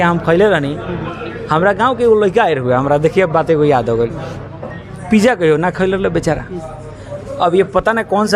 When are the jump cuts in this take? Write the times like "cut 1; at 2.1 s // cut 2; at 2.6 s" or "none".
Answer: none